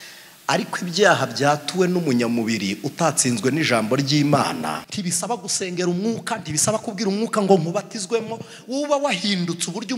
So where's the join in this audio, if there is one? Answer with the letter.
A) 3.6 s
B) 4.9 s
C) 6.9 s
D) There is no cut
B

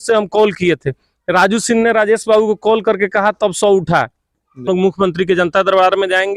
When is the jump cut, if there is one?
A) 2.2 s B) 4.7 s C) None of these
B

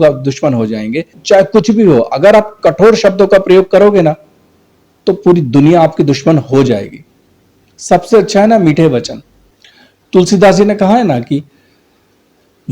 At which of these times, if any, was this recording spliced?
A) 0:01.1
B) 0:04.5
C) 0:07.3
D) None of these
A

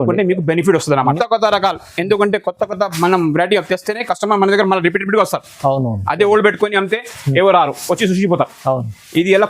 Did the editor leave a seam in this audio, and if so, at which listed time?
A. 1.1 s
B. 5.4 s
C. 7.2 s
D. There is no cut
A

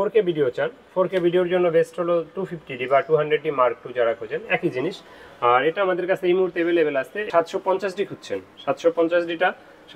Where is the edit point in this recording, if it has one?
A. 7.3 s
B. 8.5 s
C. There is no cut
A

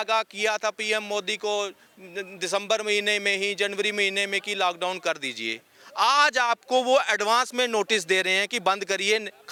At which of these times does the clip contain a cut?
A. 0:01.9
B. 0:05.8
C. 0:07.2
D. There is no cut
D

